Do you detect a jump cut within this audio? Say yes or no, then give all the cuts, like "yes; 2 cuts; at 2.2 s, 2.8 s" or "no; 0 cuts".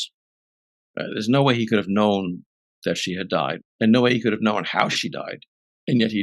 yes; 1 cut; at 3.6 s